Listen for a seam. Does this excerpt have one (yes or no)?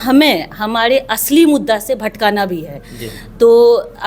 no